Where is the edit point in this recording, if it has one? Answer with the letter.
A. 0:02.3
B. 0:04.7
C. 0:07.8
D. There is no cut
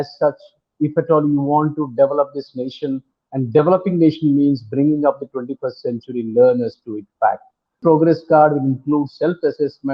C